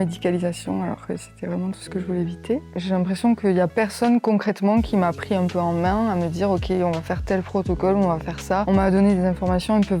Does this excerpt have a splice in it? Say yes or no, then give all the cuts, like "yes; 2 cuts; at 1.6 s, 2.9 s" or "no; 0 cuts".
yes; 2 cuts; at 2.7 s, 8.6 s